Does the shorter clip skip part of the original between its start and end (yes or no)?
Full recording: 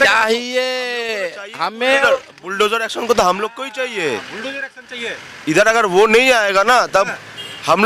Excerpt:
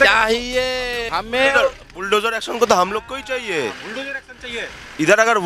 yes